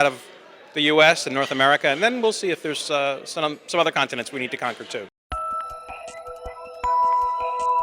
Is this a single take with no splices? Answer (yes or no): no